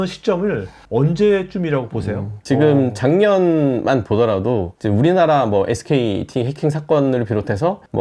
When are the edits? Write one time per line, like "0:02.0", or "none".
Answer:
0:02.3